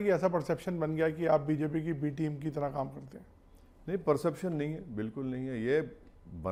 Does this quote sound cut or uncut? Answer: uncut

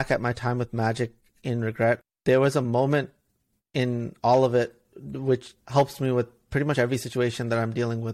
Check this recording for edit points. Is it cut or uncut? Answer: cut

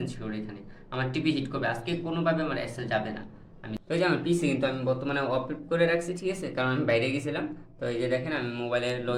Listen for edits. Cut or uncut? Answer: cut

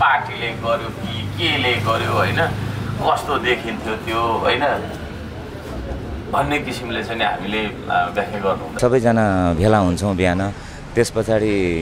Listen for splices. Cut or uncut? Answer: cut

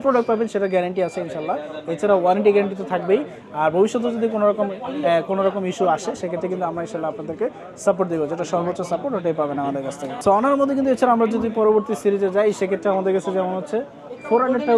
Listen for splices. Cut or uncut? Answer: uncut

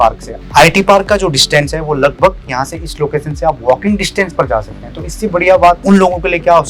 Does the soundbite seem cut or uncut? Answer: cut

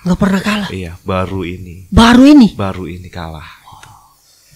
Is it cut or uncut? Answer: uncut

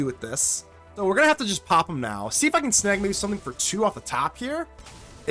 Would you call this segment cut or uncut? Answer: cut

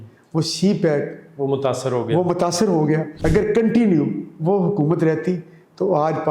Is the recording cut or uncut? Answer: cut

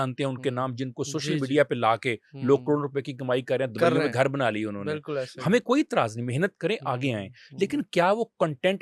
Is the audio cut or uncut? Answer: uncut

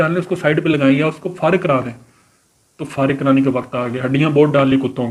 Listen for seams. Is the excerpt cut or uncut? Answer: uncut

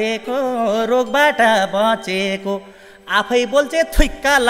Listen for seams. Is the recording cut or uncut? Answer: uncut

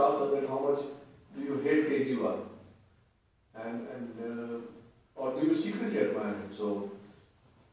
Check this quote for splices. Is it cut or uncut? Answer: cut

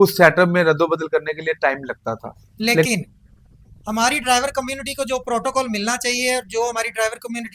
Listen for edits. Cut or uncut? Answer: cut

